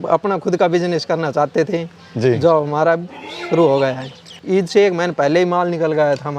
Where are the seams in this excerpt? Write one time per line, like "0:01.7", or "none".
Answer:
0:04.4